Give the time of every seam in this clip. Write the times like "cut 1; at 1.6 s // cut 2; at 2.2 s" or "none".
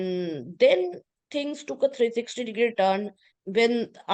none